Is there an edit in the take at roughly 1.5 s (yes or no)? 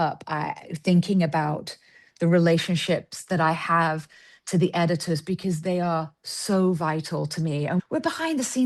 no